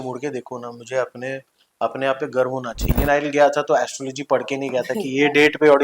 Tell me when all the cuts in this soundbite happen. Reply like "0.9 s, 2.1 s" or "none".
2.8 s